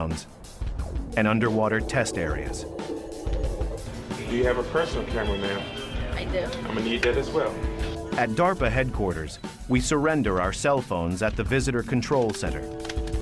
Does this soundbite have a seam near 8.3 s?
yes; 1 cut; at 8.3 s

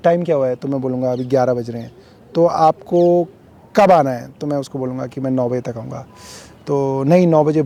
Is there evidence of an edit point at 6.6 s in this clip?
no; 0 cuts

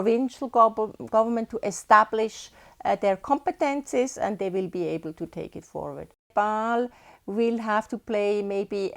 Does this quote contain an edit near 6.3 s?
yes; 1 cut; at 6.3 s

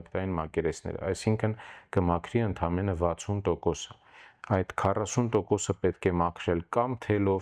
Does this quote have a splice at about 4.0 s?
no; 0 cuts

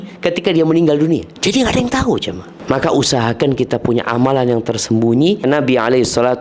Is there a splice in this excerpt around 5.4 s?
yes; 3 cuts; at 1.3 s, 2.5 s, 5.4 s

